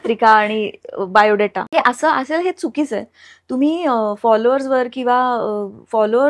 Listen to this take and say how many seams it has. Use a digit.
1